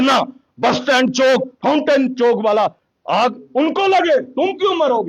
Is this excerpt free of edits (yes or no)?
no